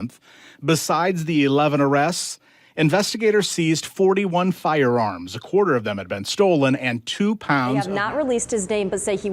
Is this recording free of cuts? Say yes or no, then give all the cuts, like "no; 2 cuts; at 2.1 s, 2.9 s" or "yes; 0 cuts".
no; 1 cut; at 7.9 s